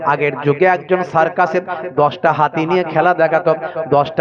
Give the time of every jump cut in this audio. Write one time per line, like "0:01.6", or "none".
none